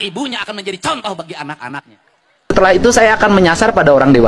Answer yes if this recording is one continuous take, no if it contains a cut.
no